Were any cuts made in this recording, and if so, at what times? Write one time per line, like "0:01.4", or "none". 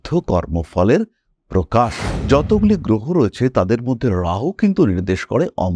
0:02.1